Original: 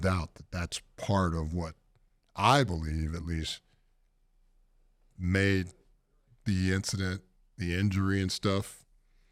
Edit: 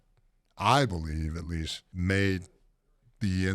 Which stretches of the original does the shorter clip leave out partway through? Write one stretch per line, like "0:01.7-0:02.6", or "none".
0:03.6-0:05.0